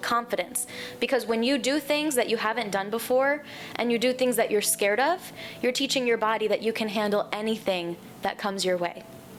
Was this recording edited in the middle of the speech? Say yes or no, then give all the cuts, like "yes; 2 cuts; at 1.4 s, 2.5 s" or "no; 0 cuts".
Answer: no; 0 cuts